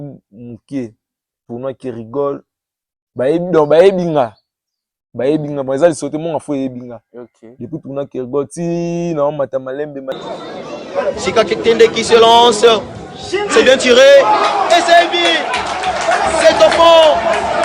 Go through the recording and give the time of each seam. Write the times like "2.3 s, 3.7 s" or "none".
10.1 s